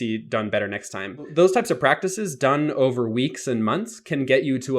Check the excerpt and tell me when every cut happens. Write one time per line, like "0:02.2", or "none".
0:01.3